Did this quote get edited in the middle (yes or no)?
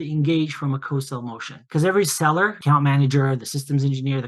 yes